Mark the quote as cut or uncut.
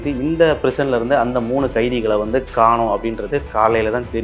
uncut